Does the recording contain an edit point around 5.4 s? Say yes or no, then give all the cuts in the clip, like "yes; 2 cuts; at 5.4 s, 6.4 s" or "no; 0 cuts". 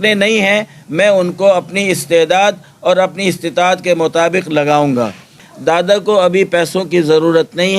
yes; 1 cut; at 5.4 s